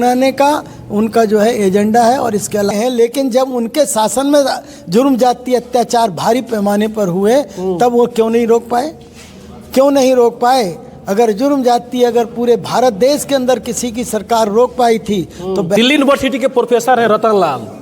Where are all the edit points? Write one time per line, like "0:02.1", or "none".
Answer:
0:02.7
0:15.8